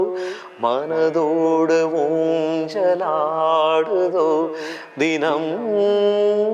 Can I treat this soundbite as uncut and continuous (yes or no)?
yes